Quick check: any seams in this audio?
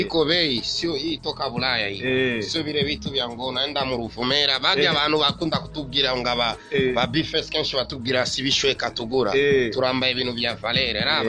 no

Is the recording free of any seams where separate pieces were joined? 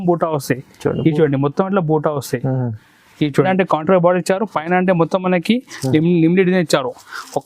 no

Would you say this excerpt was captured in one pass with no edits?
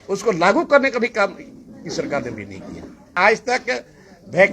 no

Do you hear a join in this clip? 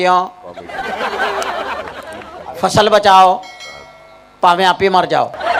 no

